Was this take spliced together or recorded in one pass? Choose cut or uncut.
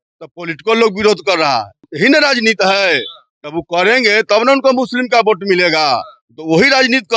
cut